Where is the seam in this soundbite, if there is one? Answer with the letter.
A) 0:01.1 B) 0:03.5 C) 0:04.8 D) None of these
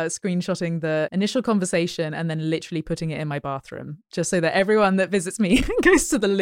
A